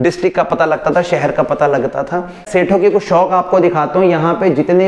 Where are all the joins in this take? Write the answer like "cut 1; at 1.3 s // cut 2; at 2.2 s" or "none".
cut 1; at 2.4 s